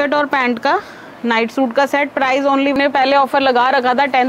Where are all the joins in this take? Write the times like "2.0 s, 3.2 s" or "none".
2.8 s